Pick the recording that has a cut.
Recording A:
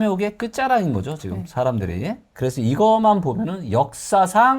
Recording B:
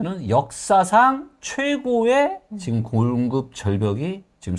A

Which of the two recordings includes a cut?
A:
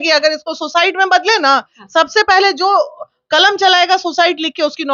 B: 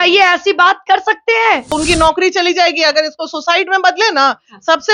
B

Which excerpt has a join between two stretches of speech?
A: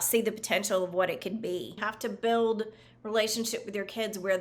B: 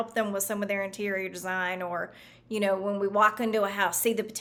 A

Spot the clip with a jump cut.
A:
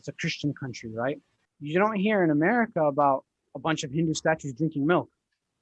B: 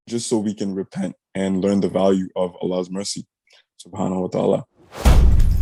A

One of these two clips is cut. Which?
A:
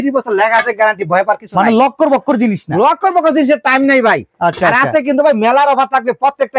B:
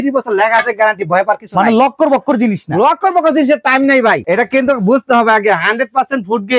B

